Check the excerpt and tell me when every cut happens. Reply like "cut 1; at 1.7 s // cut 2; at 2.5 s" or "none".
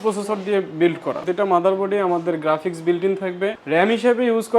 cut 1; at 1.3 s // cut 2; at 3.6 s